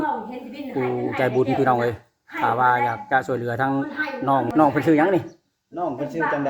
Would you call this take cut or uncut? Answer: cut